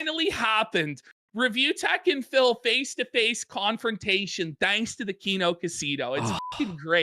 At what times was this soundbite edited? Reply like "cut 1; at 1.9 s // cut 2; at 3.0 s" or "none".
none